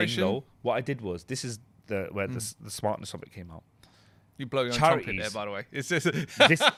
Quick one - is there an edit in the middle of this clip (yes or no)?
no